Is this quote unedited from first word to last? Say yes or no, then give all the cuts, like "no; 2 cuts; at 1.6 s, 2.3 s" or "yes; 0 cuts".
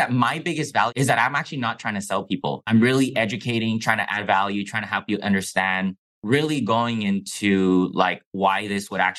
no; 3 cuts; at 0.9 s, 2.7 s, 6.2 s